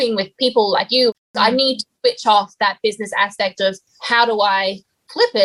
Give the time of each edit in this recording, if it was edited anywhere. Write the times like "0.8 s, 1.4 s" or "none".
1.1 s, 3.9 s